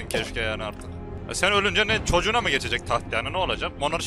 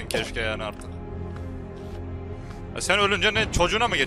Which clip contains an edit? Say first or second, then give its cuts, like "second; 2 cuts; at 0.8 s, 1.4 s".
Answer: first; 1 cut; at 1.1 s